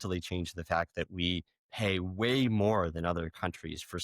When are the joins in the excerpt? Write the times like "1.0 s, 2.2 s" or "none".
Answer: none